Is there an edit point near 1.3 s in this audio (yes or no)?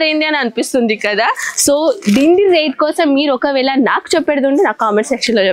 no